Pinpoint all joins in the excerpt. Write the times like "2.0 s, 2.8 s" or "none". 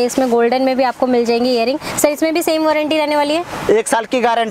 none